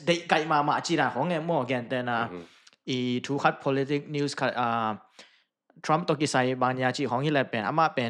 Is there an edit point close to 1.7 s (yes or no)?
no